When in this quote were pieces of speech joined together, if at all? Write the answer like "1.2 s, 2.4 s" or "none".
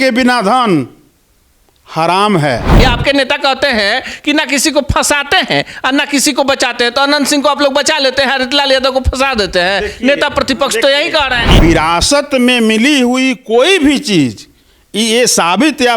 2.8 s, 11.4 s